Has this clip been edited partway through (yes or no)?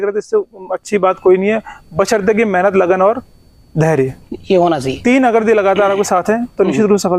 no